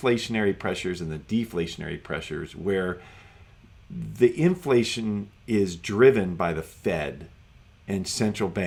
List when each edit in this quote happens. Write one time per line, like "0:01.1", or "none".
none